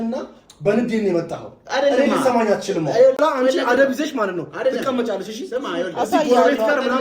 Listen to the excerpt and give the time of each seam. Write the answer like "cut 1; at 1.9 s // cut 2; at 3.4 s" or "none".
cut 1; at 3.2 s